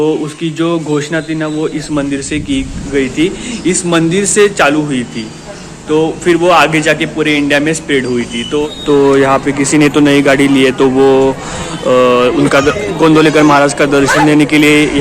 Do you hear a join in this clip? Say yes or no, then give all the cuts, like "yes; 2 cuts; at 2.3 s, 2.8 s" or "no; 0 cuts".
yes; 1 cut; at 8.7 s